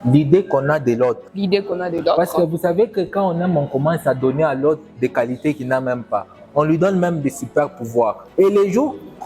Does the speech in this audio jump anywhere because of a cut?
no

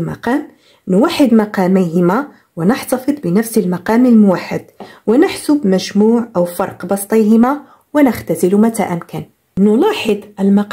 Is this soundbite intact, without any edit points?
no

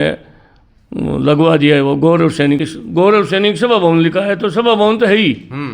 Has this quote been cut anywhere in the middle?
yes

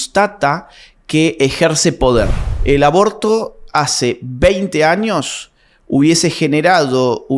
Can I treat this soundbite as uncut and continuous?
no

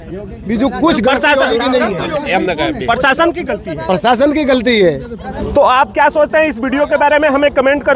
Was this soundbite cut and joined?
no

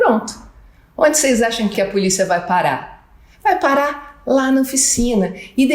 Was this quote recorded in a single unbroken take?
no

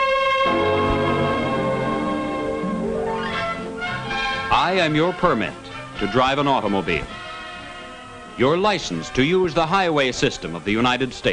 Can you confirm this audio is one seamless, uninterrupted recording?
no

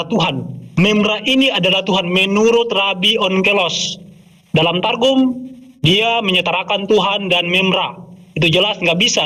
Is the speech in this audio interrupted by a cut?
no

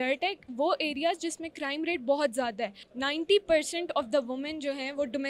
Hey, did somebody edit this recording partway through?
yes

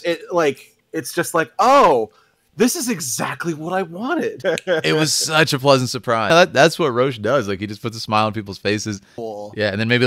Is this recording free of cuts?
no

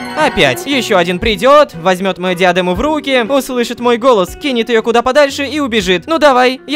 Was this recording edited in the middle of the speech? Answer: no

